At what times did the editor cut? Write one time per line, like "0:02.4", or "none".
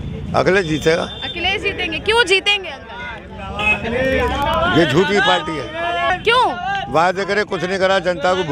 0:06.1

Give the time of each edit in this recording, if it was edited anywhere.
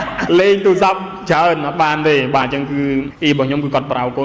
0:03.1

